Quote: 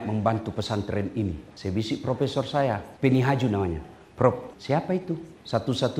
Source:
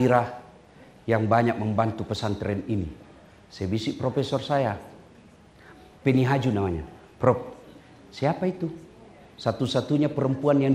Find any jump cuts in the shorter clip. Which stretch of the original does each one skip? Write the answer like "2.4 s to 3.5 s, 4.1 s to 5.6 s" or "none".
3.0 s to 3.4 s, 4.8 s to 5.9 s, 8.0 s to 8.9 s